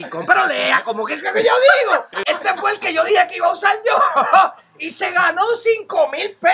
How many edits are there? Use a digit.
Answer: 1